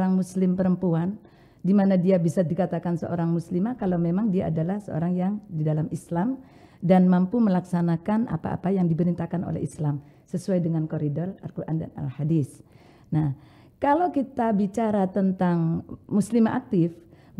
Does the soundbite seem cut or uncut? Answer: uncut